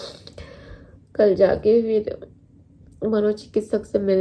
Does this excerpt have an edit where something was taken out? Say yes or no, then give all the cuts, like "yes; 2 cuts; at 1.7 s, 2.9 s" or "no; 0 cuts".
no; 0 cuts